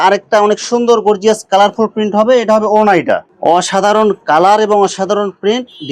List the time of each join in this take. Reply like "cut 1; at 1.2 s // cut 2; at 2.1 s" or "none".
cut 1; at 3.3 s